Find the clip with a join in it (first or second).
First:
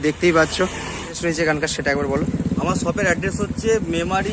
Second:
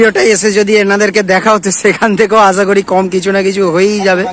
first